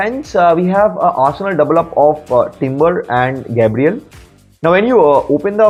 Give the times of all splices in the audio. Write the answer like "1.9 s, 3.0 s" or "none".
none